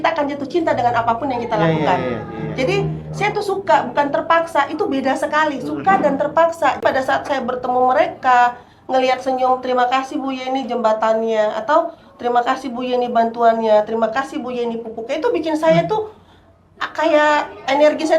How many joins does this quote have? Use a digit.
1